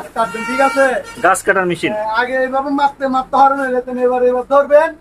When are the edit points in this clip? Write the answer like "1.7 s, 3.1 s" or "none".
none